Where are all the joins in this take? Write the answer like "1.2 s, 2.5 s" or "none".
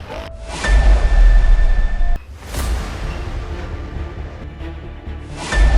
2.2 s, 4.4 s